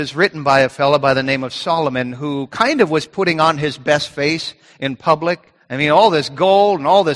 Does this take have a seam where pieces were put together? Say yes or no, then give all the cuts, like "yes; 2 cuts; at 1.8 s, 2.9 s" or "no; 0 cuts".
no; 0 cuts